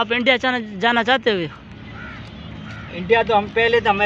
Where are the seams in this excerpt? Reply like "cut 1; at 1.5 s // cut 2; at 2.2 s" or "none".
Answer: none